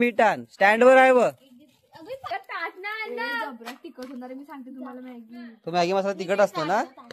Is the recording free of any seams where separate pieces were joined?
no; 1 cut; at 2.3 s

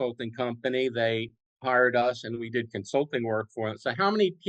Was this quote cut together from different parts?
no; 0 cuts

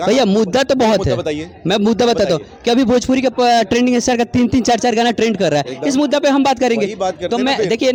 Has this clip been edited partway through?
no; 0 cuts

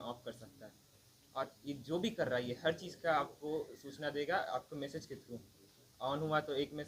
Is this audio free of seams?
yes; 0 cuts

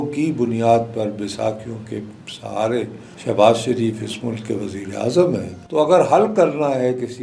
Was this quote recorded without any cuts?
no; 2 cuts; at 3.0 s, 5.6 s

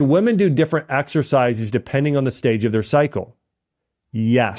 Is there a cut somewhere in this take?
no; 0 cuts

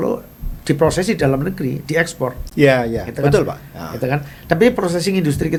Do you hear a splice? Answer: no; 0 cuts

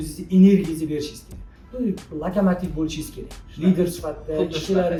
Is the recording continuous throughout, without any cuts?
yes; 0 cuts

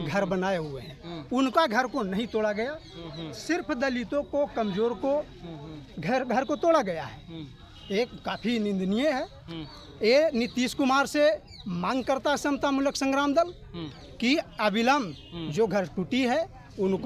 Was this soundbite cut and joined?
no; 0 cuts

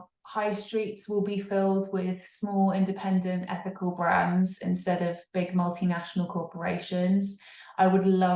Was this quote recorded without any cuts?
yes; 0 cuts

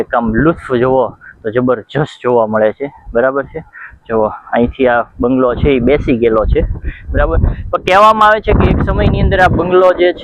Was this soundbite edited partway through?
no; 0 cuts

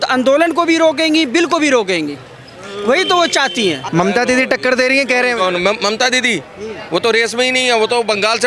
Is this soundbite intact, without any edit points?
no; 1 cut; at 3.8 s

